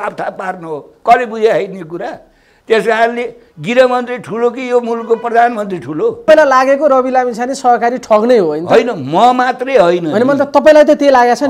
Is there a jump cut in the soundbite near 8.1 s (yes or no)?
no